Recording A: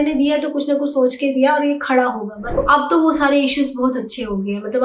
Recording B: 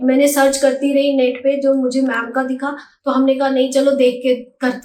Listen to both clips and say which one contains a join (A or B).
A